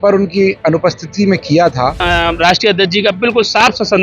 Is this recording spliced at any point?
yes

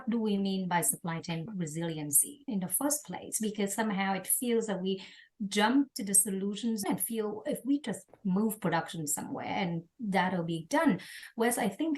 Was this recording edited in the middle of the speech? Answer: yes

